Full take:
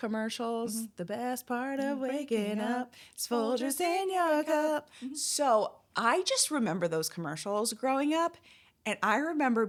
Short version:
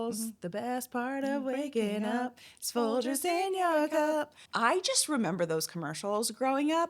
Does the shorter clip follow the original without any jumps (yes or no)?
no